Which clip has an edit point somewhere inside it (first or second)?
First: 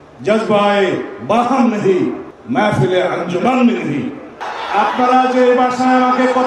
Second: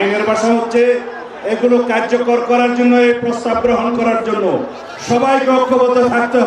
first